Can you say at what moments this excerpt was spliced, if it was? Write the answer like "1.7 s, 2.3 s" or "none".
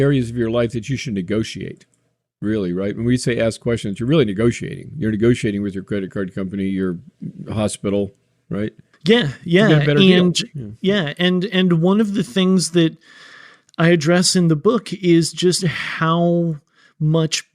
8.9 s